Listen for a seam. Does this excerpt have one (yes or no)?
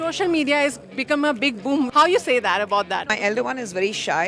yes